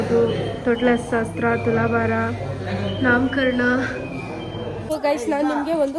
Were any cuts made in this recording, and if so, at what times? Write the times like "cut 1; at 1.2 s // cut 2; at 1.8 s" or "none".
cut 1; at 4.9 s